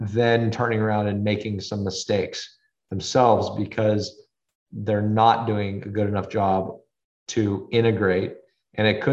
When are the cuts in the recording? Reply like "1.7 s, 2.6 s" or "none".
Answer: none